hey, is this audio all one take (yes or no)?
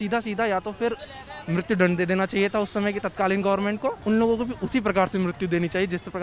no